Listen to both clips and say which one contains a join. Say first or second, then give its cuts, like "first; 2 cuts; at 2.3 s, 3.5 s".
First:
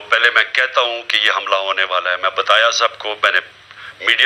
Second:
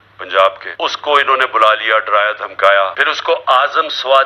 second; 2 cuts; at 1.0 s, 3.1 s